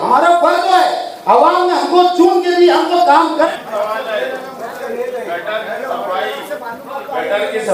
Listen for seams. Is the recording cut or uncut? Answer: cut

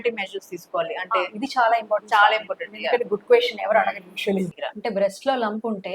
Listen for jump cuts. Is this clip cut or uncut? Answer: cut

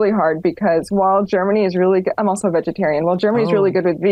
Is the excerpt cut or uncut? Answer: uncut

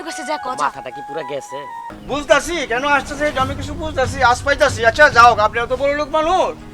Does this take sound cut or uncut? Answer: cut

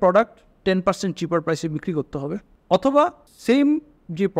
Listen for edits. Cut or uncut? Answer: cut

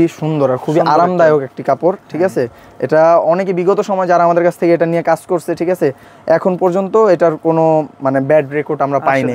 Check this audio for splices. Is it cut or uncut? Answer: uncut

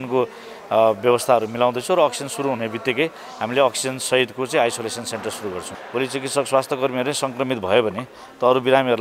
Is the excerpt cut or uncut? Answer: cut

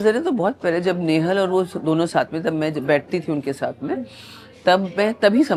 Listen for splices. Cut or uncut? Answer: uncut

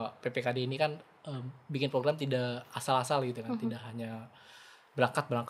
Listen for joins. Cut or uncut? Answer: uncut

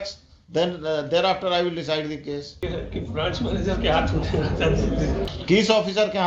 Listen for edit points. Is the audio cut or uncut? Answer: cut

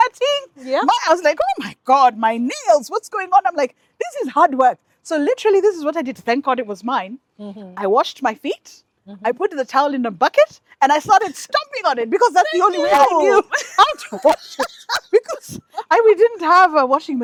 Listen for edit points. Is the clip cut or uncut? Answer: uncut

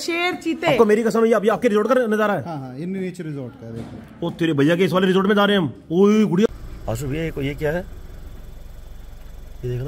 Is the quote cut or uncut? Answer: cut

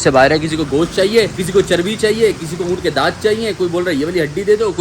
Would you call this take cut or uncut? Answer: cut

